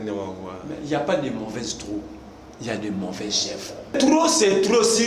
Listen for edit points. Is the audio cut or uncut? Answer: cut